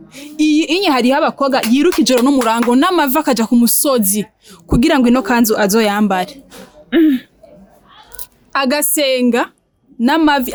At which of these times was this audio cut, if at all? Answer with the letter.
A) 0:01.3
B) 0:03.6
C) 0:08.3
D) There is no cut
D